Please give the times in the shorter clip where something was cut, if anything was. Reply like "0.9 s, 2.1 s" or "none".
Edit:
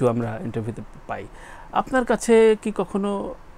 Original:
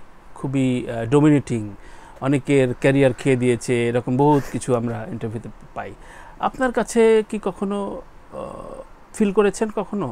none

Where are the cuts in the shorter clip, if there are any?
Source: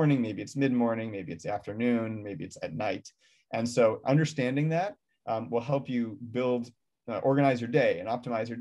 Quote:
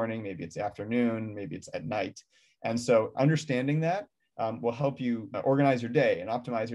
5.3 s

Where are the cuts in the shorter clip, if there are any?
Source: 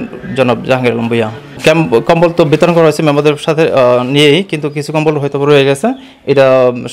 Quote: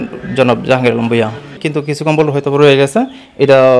1.6 s

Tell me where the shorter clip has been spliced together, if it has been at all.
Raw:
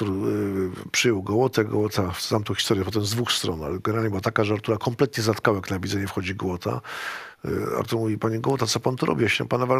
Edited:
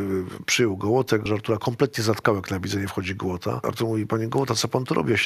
1.3 s, 3.6 s

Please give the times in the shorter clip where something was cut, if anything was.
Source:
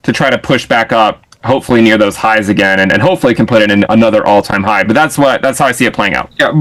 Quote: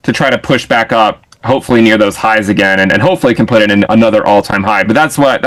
none

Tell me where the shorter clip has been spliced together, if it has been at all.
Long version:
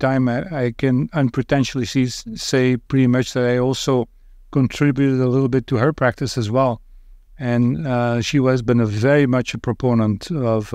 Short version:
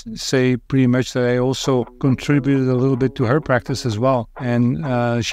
1.9 s, 4.3 s

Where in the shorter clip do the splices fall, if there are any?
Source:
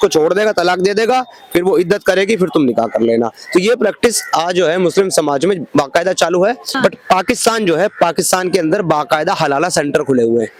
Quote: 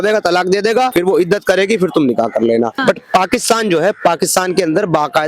0.9 s, 2.7 s

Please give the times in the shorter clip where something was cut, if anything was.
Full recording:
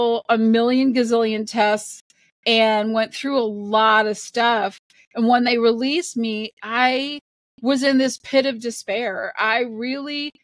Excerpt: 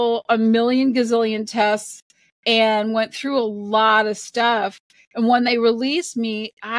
none

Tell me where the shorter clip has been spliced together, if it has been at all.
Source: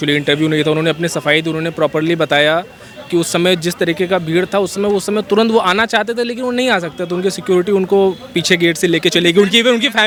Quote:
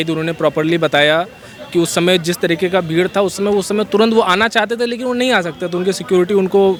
none

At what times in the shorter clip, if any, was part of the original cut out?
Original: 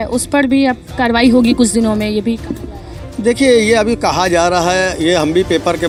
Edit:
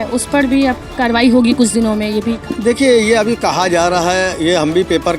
2.5 s

